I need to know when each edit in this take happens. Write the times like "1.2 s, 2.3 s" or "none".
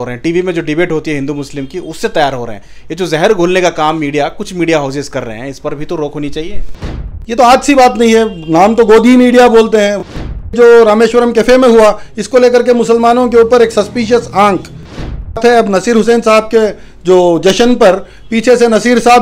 6.8 s, 10.0 s, 15.2 s